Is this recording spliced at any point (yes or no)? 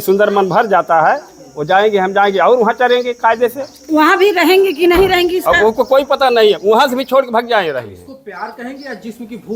no